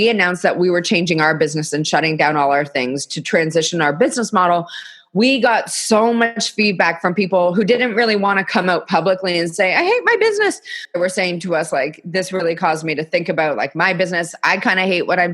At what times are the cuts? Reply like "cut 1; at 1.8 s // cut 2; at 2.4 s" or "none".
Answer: cut 1; at 10.8 s